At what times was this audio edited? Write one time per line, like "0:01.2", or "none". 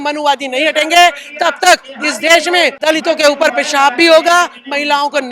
0:02.8